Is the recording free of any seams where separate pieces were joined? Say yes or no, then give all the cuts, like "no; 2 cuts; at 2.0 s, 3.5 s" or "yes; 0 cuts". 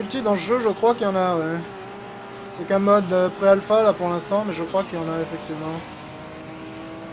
no; 1 cut; at 5.8 s